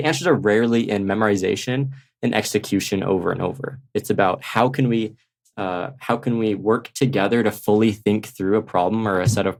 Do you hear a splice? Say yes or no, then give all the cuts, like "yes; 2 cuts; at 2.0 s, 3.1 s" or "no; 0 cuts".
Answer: no; 0 cuts